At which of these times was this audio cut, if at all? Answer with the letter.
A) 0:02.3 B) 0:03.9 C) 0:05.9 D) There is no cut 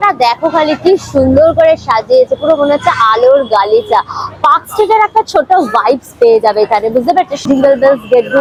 D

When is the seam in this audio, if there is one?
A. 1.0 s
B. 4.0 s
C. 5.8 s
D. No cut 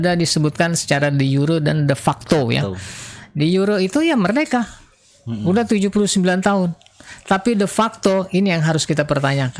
D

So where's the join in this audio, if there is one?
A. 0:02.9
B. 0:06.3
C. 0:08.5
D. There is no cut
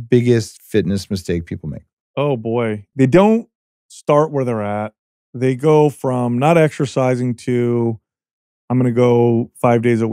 A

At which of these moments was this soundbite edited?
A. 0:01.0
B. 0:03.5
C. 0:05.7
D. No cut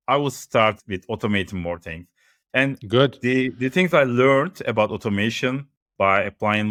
D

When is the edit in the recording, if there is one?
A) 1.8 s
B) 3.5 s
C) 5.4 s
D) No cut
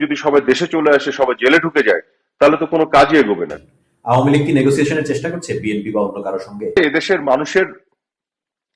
B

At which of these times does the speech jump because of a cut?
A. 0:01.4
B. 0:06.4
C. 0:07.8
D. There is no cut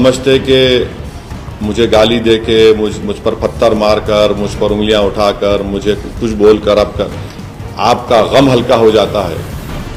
D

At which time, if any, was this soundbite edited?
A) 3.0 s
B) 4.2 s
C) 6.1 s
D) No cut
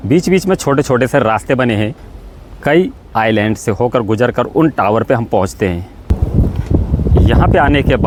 D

